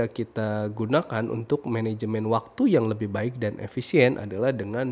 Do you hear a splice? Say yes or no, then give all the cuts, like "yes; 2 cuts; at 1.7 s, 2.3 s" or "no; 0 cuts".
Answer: no; 0 cuts